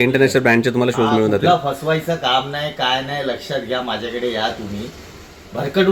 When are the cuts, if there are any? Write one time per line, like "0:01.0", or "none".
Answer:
none